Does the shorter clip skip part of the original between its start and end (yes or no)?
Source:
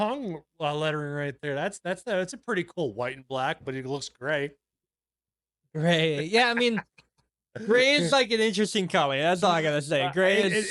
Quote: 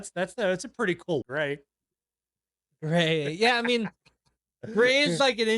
yes